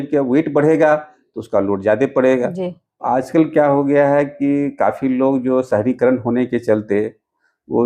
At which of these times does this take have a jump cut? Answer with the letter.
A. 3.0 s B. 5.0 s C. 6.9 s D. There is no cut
A